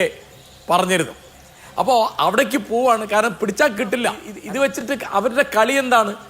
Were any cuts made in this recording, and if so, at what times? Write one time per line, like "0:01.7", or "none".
0:04.7